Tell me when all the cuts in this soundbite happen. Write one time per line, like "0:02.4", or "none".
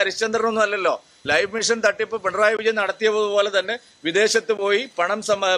none

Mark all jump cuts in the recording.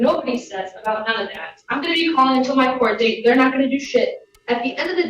none

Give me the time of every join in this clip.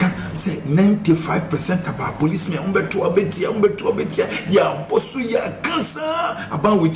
none

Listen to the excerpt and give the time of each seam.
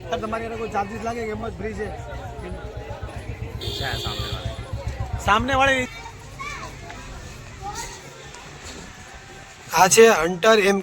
0:05.9

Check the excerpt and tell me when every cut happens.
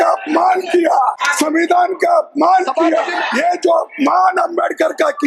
0:01.2
0:03.2

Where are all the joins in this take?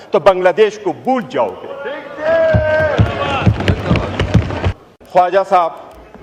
0:04.8

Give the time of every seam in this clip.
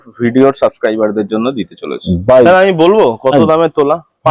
0:02.5

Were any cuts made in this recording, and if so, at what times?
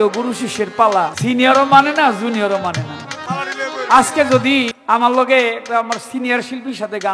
0:01.2
0:04.8

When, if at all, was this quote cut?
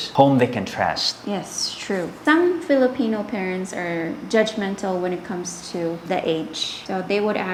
none

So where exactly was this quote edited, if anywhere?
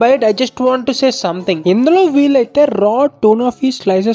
0:01.6

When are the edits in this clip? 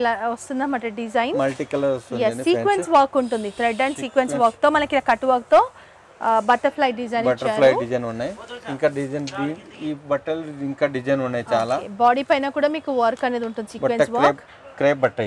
none

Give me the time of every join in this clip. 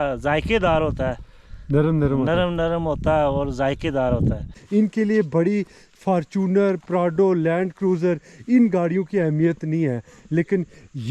0:04.5

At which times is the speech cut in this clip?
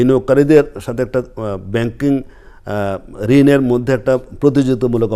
none

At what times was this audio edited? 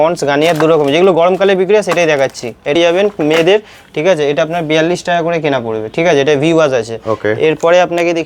0:02.8

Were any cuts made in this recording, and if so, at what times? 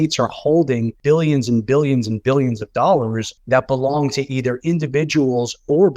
0:00.9
0:03.3

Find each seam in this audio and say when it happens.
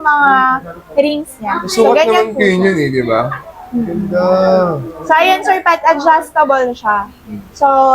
none

